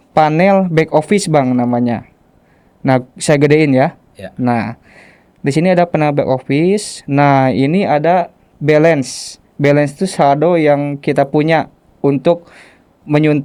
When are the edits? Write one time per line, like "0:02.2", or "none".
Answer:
none